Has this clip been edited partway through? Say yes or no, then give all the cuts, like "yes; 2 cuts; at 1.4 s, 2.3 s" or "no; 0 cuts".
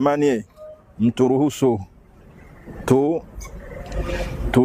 no; 0 cuts